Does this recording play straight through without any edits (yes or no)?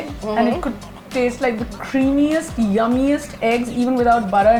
yes